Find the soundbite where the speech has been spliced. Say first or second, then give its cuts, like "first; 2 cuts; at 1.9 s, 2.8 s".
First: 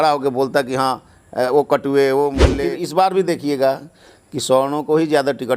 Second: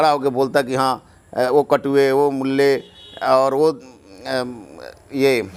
first; 1 cut; at 2.6 s